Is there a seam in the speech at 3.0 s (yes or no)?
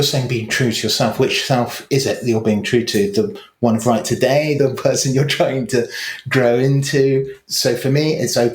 no